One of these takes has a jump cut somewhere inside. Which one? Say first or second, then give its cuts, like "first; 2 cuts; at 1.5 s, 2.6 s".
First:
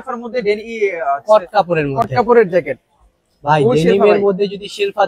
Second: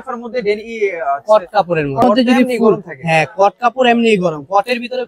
second; 1 cut; at 2.0 s